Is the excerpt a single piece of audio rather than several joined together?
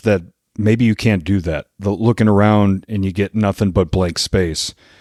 yes; 0 cuts

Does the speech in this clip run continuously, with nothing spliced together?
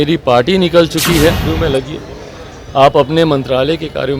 no; 1 cut; at 1.5 s

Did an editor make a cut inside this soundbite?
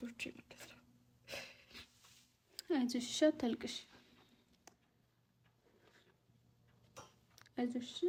no; 0 cuts

